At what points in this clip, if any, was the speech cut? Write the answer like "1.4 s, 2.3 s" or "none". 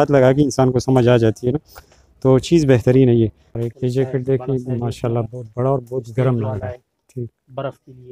3.5 s